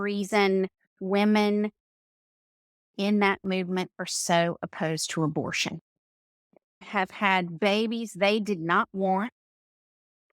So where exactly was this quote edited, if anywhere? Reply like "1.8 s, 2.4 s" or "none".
6.8 s